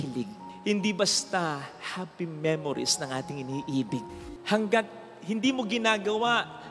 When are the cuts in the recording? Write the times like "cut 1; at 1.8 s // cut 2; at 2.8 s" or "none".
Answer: cut 1; at 4.3 s